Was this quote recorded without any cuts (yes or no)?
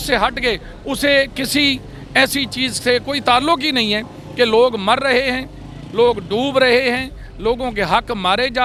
yes